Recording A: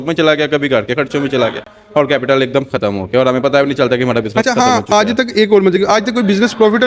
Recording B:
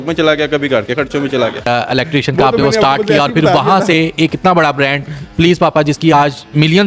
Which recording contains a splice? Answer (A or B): B